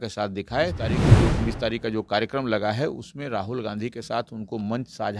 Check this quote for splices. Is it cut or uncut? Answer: cut